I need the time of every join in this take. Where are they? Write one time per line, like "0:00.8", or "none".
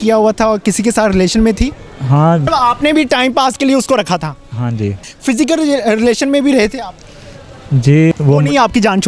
0:02.4
0:05.1
0:08.1